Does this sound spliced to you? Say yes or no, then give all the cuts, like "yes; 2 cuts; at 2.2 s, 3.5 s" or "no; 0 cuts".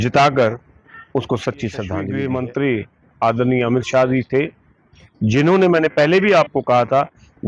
yes; 1 cut; at 2.0 s